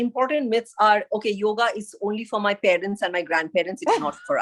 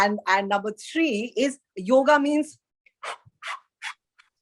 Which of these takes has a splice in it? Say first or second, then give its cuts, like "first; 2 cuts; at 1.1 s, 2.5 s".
second; 1 cut; at 1.7 s